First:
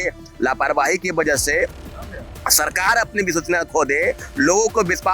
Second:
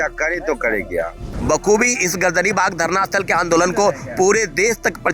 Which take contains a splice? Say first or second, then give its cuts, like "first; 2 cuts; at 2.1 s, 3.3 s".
second; 1 cut; at 1.3 s